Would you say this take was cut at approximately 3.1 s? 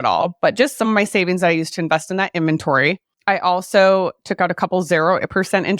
yes; 1 cut; at 3.1 s

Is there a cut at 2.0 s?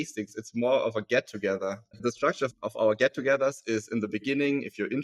yes; 1 cut; at 2.0 s

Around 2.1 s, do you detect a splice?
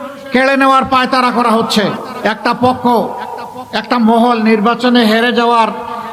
yes; 1 cut; at 2.1 s

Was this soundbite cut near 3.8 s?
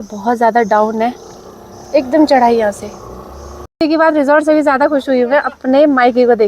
yes; 1 cut; at 3.8 s

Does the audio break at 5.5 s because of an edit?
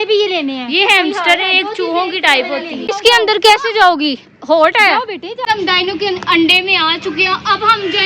yes; 2 cuts; at 2.8 s, 5.5 s

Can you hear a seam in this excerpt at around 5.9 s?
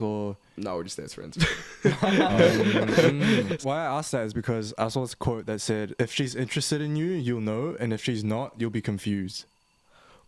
yes; 2 cuts; at 3.5 s, 5.9 s

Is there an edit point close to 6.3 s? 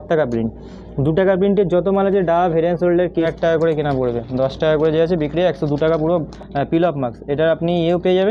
yes; 2 cuts; at 3.3 s, 6.3 s

